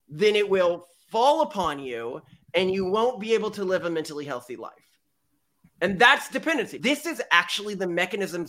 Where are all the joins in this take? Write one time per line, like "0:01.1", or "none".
0:06.8